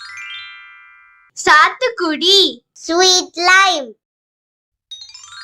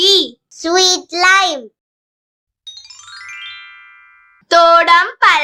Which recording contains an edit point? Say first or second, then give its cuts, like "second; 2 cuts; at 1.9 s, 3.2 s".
first; 1 cut; at 1.2 s